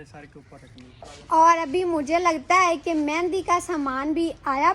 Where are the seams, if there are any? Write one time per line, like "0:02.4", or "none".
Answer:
0:01.0